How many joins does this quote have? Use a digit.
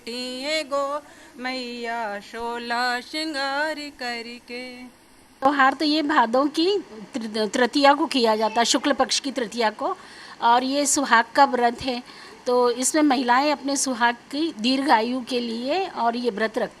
1